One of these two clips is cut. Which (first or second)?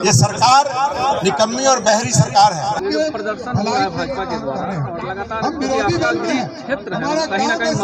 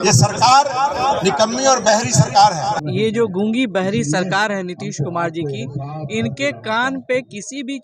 second